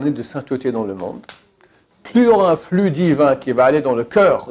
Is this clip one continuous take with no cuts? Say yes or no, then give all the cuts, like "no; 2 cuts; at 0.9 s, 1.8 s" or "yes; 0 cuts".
yes; 0 cuts